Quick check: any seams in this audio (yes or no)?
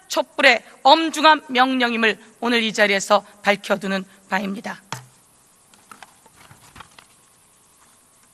yes